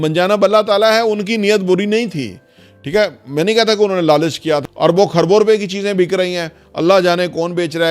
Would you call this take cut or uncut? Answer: cut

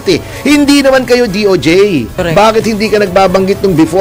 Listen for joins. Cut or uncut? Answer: cut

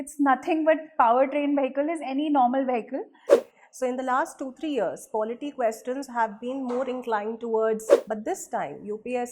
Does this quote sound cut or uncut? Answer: cut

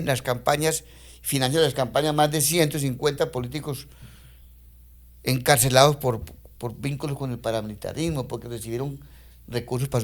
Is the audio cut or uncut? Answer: uncut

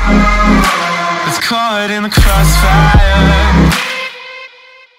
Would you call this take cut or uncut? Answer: cut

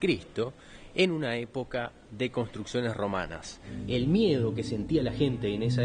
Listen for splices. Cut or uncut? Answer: cut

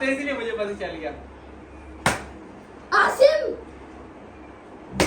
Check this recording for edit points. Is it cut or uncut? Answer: uncut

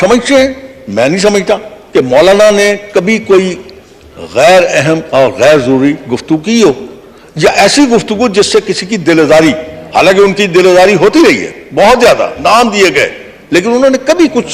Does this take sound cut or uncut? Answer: uncut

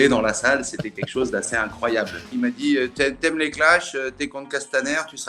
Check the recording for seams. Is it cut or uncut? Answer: cut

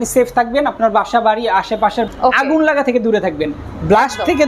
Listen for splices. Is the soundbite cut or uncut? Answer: cut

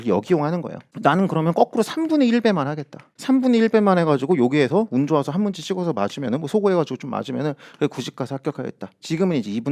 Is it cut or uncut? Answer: uncut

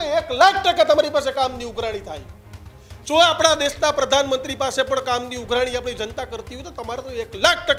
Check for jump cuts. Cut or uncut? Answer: uncut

